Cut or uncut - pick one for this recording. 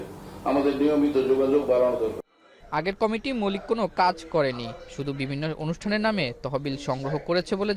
uncut